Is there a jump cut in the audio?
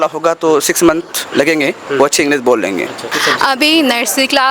yes; 1 cut; at 3.1 s

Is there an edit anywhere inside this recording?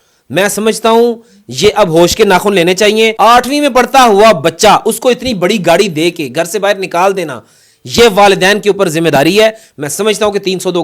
yes; 1 cut; at 3.1 s

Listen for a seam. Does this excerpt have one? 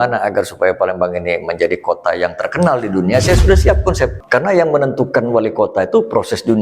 yes; 1 cut; at 4.2 s

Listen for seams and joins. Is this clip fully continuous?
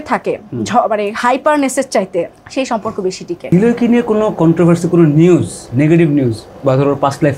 no; 2 cuts; at 2.4 s, 3.4 s

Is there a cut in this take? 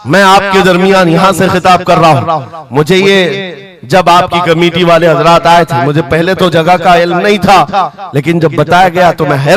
no; 0 cuts

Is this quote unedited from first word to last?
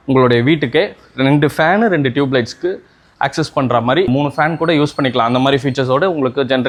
yes; 0 cuts

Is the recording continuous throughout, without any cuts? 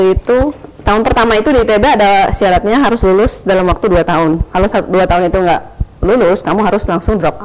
yes; 0 cuts

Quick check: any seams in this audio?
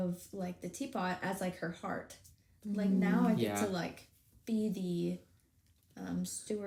no; 0 cuts

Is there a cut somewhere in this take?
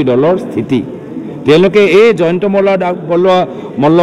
no; 0 cuts

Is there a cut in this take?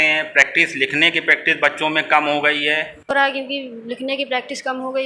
yes; 1 cut; at 3.1 s

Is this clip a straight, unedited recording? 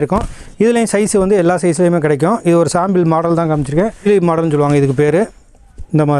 no; 1 cut; at 4.0 s

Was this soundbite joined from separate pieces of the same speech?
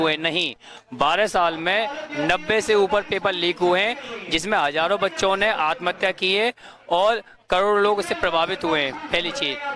no; 0 cuts

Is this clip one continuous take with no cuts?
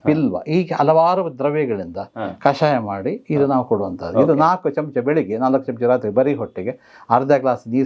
yes; 0 cuts

